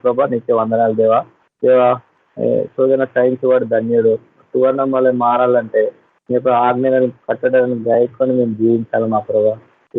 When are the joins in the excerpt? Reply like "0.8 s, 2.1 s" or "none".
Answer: 1.4 s